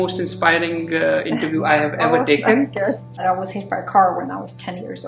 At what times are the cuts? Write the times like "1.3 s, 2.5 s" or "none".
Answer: 3.1 s